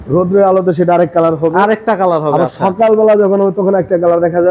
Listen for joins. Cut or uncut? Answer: uncut